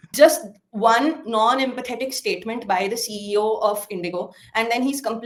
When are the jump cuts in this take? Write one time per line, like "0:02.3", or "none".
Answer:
none

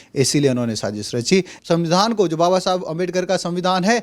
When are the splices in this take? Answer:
0:01.5

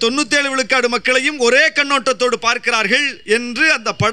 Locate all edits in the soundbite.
none

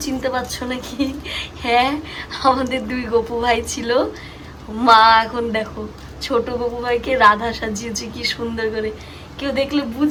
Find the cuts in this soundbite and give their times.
none

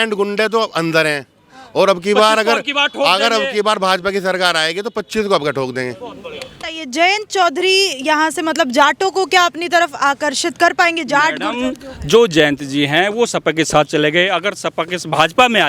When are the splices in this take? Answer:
0:06.6

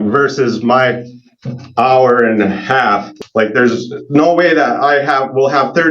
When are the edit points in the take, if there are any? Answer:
0:03.1

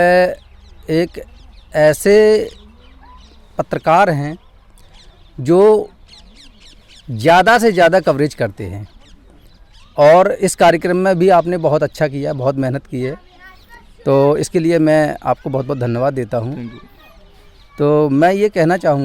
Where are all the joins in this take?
none

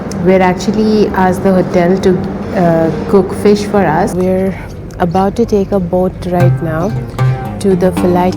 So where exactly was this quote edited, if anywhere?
0:04.1

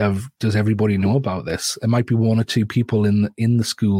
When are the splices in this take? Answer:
none

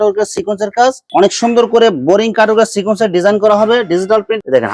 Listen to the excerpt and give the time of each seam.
0:01.0

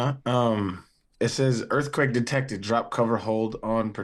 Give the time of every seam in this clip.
none

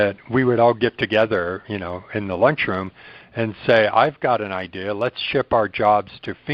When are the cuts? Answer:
none

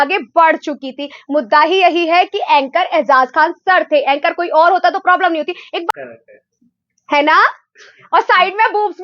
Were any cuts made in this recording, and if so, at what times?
0:05.9

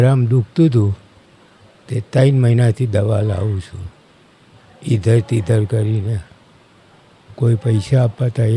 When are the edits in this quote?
none

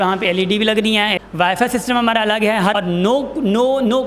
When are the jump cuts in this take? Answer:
0:01.1
0:02.7

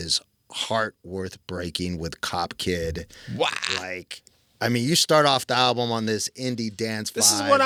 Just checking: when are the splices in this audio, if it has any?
none

